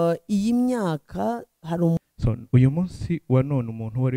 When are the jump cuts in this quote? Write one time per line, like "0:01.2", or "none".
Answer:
0:02.0